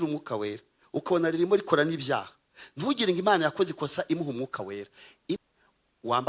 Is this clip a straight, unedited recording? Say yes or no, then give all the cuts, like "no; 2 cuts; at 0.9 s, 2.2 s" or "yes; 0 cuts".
no; 1 cut; at 5.4 s